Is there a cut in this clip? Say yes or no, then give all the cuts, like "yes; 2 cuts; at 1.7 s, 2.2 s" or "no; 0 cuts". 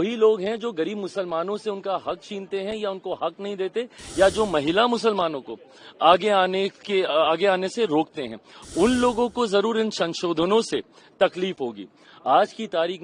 no; 0 cuts